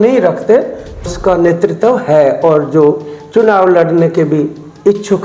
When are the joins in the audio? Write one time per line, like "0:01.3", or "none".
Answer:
0:01.1